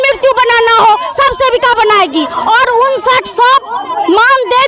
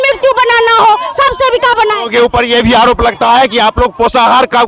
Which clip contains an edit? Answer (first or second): second